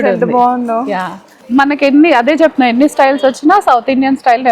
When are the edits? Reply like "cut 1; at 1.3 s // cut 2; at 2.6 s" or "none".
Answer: cut 1; at 1.4 s